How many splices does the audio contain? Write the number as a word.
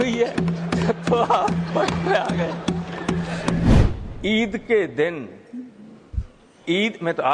one